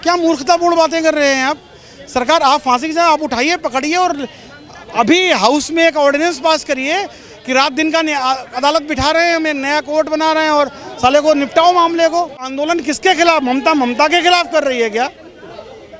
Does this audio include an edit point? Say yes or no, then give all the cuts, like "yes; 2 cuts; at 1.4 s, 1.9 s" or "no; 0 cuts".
yes; 1 cut; at 12.5 s